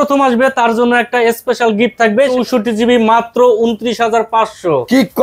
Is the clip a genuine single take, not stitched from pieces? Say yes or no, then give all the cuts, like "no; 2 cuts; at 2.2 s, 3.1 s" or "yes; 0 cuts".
no; 1 cut; at 2.3 s